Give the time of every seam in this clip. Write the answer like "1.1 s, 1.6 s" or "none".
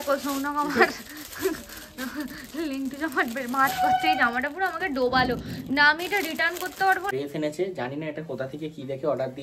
7.1 s